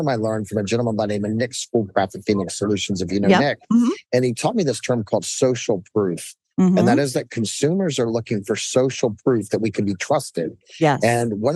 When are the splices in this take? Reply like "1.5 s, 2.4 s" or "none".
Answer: none